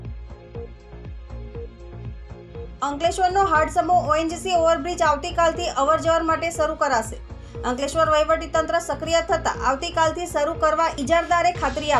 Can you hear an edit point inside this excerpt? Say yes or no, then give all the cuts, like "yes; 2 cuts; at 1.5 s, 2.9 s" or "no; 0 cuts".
yes; 1 cut; at 11.0 s